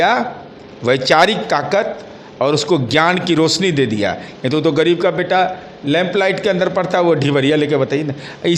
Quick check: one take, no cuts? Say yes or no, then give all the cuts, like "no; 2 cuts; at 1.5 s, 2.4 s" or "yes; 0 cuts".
yes; 0 cuts